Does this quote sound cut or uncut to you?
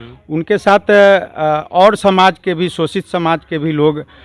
uncut